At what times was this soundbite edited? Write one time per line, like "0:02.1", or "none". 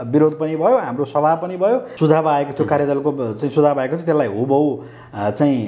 0:01.9